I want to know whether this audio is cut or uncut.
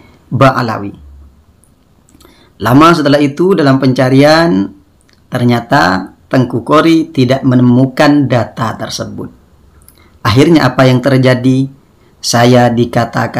uncut